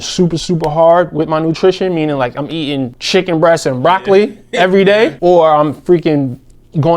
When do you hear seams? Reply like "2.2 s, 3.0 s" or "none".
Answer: 3.0 s, 5.2 s

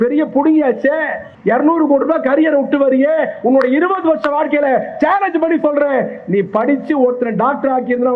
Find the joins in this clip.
1.2 s

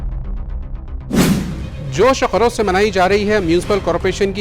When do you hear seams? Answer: 1.6 s

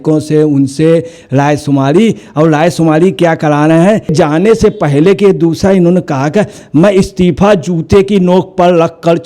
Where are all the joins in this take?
4.1 s

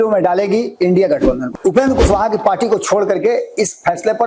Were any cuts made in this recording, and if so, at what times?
1.4 s

